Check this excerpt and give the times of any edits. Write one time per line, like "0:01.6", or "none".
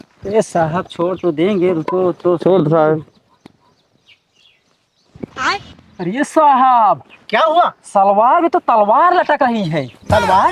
none

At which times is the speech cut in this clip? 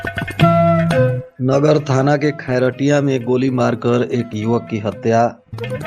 0:01.3

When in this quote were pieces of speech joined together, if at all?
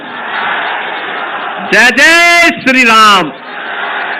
none

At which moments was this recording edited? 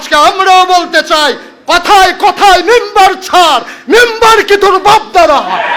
none

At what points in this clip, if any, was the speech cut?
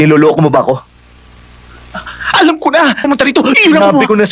0:03.0

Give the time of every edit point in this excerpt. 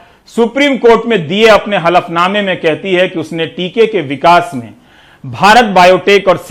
none

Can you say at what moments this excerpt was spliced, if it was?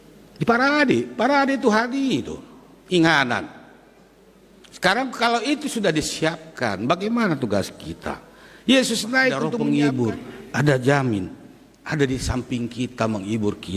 0:09.5

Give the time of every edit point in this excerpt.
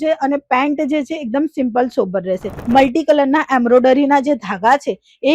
0:02.5

